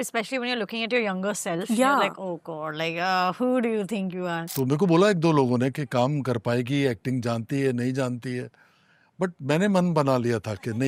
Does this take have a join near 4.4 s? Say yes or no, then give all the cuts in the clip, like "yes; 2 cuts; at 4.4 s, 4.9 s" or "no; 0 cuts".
yes; 1 cut; at 4.4 s